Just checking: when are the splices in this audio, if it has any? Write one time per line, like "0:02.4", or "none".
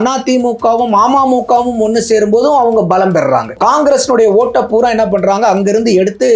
0:03.5

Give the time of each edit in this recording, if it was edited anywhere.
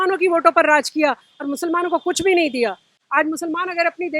none

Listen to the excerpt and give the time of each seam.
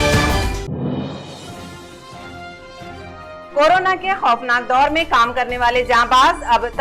0:01.3

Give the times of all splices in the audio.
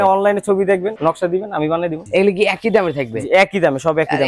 0:02.0

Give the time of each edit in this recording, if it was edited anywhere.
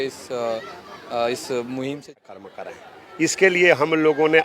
0:02.2

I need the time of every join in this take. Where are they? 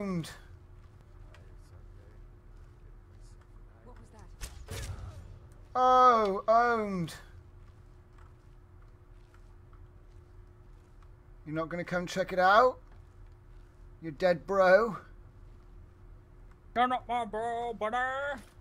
0:01.0

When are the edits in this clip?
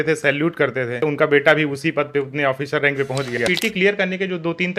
0:01.0
0:03.4

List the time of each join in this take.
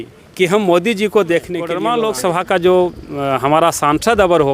0:01.8

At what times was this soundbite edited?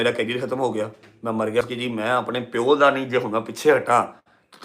0:01.6

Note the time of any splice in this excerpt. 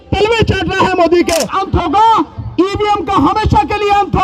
0:01.5

